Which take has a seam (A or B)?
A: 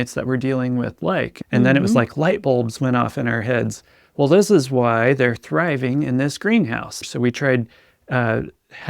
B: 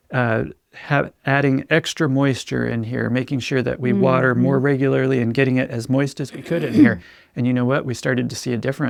A